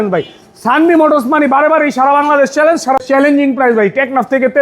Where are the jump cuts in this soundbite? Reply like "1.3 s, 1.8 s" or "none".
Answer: 3.0 s